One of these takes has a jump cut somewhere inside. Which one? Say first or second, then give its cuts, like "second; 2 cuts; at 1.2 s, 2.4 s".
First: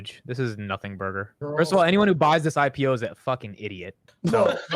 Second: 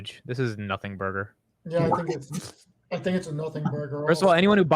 first; 1 cut; at 1.4 s